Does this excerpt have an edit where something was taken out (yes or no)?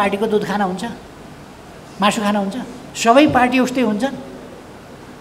yes